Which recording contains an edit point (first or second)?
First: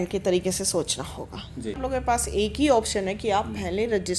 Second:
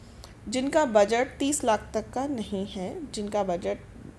first